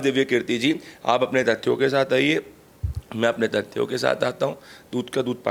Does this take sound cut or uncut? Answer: uncut